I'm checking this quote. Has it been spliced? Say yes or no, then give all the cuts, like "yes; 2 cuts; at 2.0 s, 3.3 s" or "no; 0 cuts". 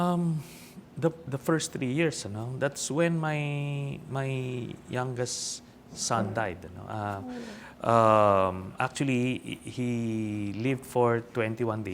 no; 0 cuts